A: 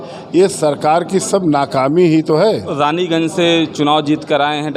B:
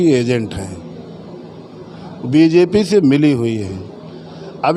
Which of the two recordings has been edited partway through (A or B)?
A